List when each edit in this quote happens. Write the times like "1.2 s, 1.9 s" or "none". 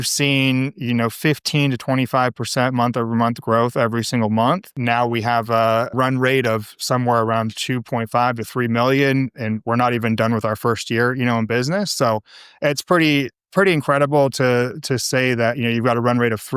4.7 s, 5.9 s